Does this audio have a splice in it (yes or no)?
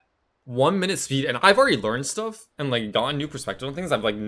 no